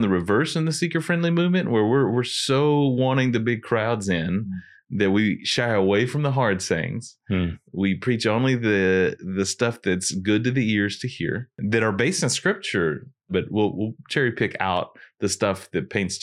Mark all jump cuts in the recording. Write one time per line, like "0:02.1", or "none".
0:11.5
0:13.3